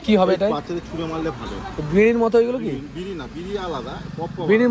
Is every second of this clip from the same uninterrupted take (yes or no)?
yes